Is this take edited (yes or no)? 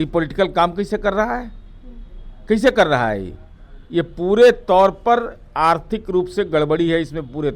no